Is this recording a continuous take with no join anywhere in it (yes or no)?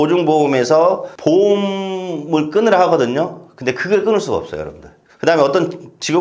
yes